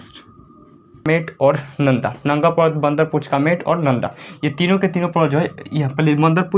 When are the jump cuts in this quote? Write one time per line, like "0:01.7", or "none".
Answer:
0:01.1